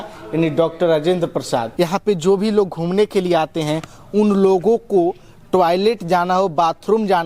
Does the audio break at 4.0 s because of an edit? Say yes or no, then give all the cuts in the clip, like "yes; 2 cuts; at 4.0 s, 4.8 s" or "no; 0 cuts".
no; 1 cut; at 1.7 s